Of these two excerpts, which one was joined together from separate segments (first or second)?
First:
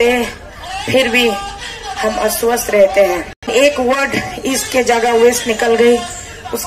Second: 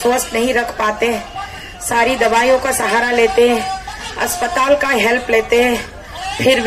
first